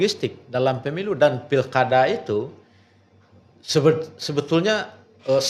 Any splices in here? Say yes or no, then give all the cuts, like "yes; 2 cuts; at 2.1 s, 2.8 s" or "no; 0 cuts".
no; 0 cuts